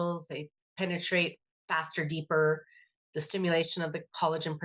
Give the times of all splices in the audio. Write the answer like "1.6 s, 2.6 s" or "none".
none

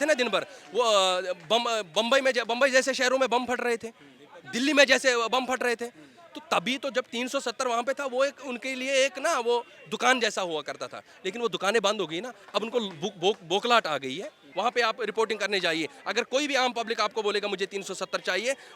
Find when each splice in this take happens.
14.4 s

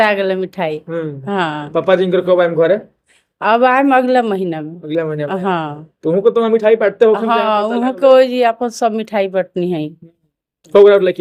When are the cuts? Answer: none

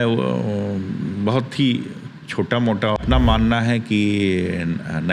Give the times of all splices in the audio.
3.0 s

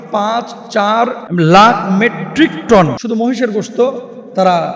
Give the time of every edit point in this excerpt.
1.2 s, 3.0 s

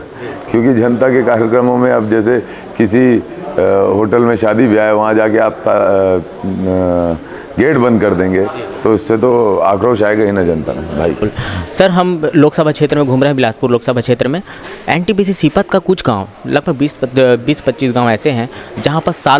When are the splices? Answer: none

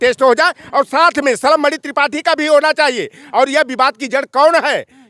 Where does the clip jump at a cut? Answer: none

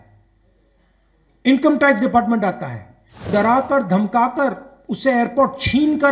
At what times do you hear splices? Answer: 3.3 s

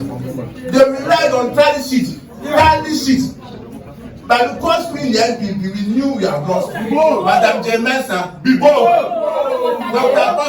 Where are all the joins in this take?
6.7 s

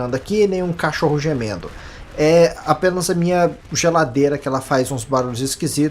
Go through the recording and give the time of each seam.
2.2 s

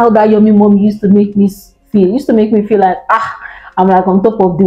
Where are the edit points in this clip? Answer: none

